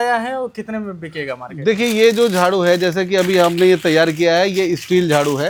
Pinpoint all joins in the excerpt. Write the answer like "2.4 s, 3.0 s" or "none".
none